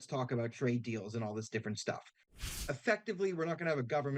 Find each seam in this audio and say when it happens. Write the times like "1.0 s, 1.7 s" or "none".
2.4 s